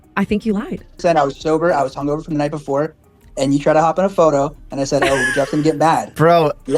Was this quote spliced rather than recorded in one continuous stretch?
yes; 1 cut; at 1.0 s

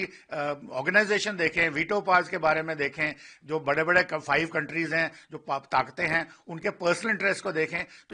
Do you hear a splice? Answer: no; 0 cuts

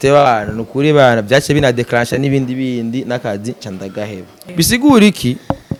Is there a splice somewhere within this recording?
no; 0 cuts

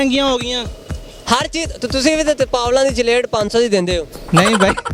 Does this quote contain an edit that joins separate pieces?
no; 0 cuts

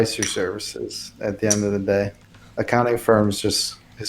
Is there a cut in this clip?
yes; 1 cut; at 2.3 s

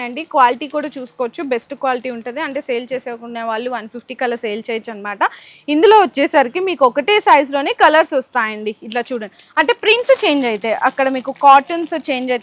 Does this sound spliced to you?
no; 0 cuts

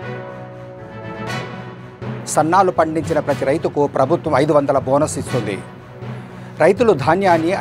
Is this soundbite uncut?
yes; 0 cuts

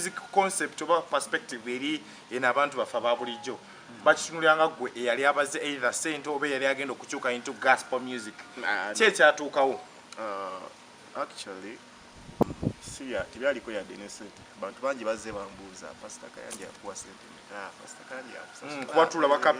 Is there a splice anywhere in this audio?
yes; 1 cut; at 12.4 s

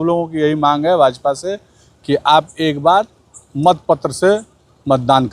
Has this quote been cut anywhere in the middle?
no; 0 cuts

